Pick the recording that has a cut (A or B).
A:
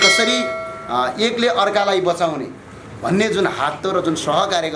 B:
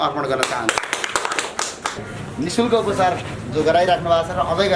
B